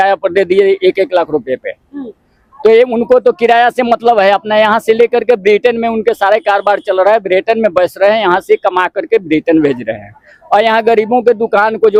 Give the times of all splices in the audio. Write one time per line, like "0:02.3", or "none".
none

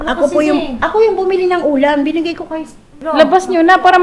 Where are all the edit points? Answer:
0:03.0

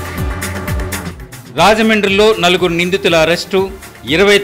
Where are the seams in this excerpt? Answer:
0:01.1

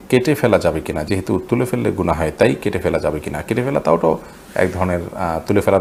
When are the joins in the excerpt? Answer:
none

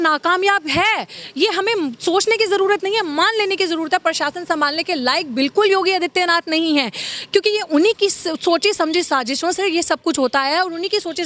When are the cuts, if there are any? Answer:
none

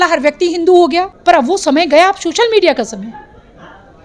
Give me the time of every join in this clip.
0:01.1

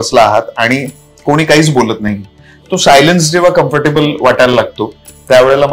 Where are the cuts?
none

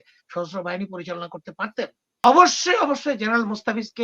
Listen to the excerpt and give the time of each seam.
0:02.2

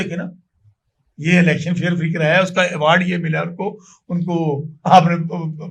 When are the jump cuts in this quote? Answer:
none

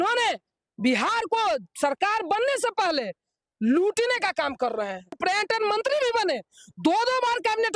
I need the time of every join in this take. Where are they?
0:05.2

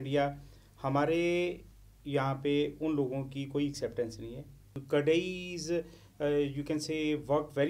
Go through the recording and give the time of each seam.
0:04.7

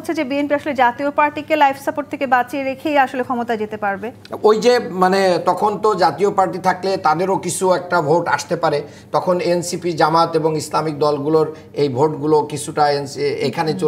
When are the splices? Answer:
none

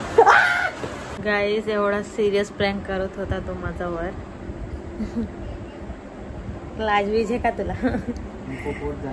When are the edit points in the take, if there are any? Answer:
0:01.1

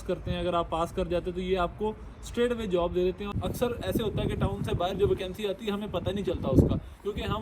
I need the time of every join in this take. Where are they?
0:03.4

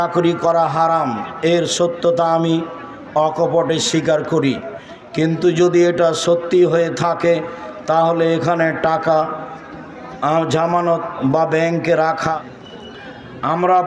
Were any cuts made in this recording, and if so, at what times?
0:12.5

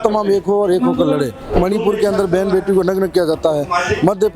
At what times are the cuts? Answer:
0:01.5

